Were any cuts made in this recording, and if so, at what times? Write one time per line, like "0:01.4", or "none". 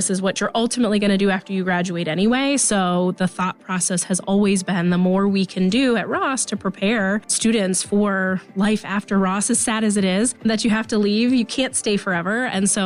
0:07.3
0:10.4